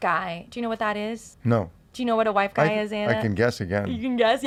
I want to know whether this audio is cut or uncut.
uncut